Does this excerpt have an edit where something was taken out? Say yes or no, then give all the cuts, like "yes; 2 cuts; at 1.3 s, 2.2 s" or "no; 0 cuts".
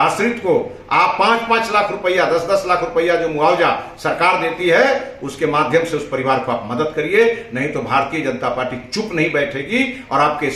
no; 0 cuts